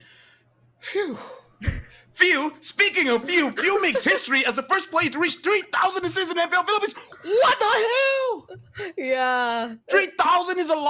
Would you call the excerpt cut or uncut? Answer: uncut